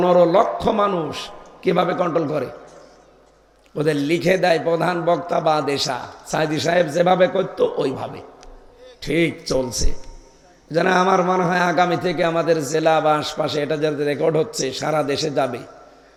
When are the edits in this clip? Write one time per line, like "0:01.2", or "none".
none

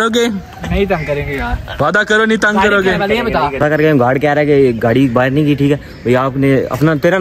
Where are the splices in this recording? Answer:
0:03.5

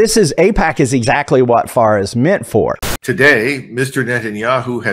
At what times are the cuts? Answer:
0:02.8

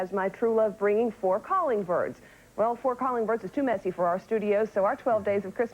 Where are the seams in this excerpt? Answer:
none

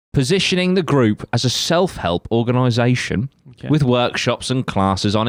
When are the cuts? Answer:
none

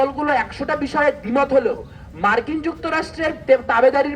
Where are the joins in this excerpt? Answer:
none

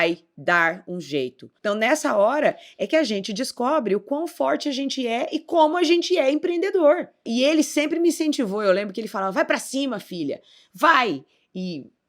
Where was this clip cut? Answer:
0:01.4
0:07.2

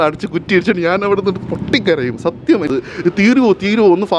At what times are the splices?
0:02.7

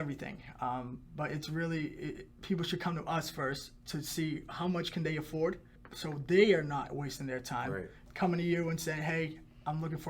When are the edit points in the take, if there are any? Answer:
0:08.0

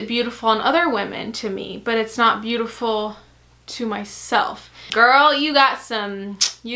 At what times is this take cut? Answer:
0:04.9

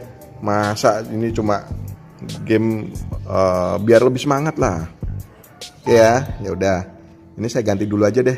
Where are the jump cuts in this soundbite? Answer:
none

